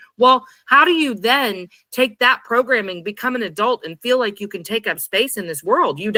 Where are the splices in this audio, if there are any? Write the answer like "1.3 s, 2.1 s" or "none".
none